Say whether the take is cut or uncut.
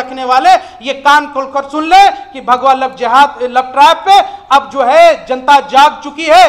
uncut